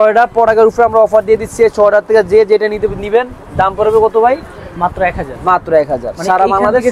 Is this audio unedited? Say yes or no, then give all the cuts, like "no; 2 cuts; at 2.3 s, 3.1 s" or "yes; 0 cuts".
yes; 0 cuts